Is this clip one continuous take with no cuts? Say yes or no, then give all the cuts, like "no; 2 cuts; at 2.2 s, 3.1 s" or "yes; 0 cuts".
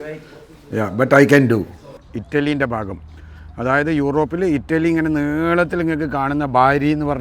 no; 1 cut; at 2.1 s